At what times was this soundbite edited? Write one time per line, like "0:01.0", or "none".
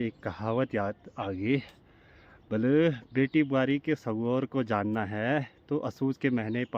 none